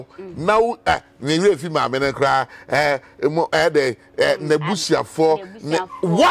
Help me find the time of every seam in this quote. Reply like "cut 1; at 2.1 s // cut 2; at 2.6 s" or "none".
none